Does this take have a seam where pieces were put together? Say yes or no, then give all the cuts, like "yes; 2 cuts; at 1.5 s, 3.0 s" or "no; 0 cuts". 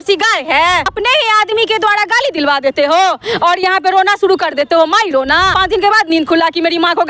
yes; 2 cuts; at 0.9 s, 5.5 s